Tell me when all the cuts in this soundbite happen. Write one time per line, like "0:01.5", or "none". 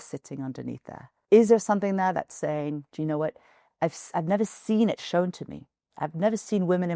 0:01.2
0:02.9

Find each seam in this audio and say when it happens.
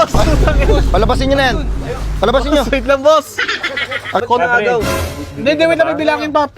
0:04.2

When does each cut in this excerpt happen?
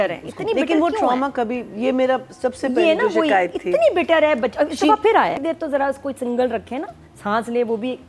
0:05.4

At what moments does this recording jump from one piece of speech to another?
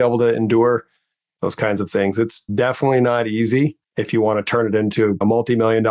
0:02.5
0:03.9
0:05.2

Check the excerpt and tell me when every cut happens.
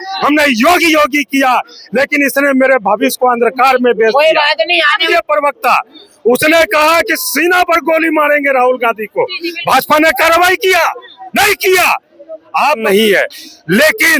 0:05.1
0:12.8

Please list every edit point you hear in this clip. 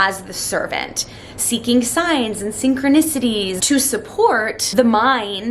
0:03.6
0:04.6

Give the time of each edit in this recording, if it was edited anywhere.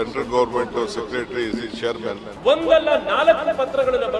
0:02.3

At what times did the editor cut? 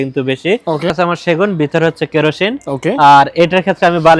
0:00.9

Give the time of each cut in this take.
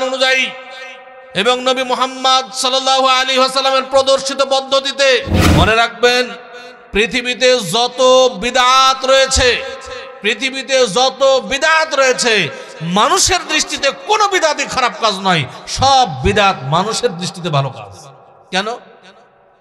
0:05.4

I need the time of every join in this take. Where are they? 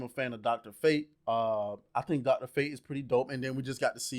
0:01.1

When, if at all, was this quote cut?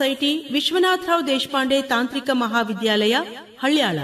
none

